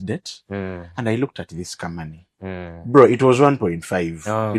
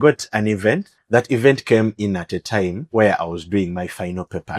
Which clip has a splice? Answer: second; 2 cuts; at 0.9 s, 2.8 s

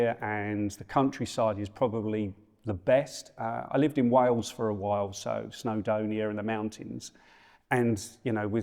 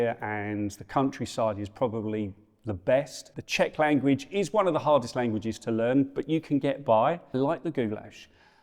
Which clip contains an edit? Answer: second; 2 cuts; at 3.2 s, 7.3 s

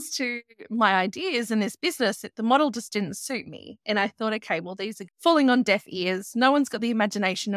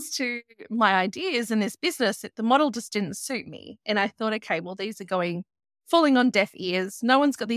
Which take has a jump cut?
first; 1 cut; at 5.0 s

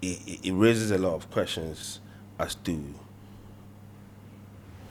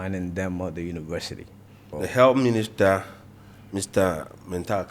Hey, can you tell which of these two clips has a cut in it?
second; 1 cut; at 1.9 s

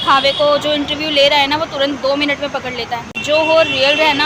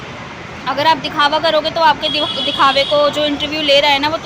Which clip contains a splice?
first; 1 cut; at 3.2 s

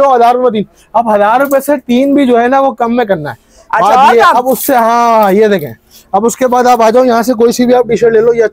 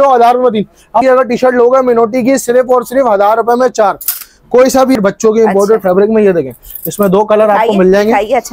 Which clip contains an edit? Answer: second; 2 cuts; at 1.0 s, 5.0 s

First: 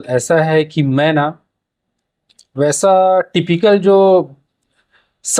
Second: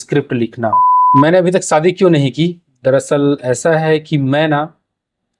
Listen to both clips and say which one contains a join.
second; 1 cut; at 0.9 s

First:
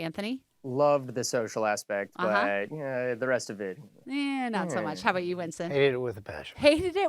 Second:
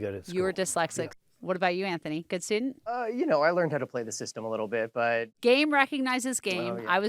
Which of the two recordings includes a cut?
second; 3 cuts; at 1.1 s, 3.0 s, 5.3 s

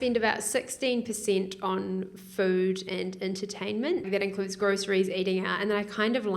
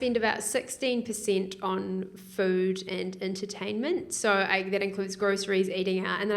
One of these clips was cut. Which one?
first; 1 cut; at 4.1 s

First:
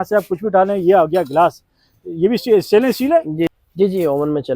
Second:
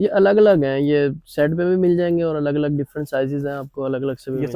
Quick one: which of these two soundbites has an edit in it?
first; 1 cut; at 3.5 s

